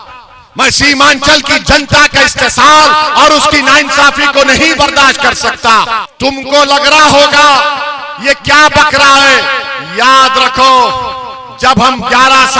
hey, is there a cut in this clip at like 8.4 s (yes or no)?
no